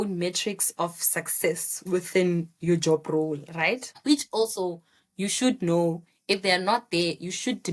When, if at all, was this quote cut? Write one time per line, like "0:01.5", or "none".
none